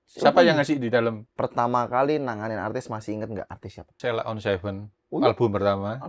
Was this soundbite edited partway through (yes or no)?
yes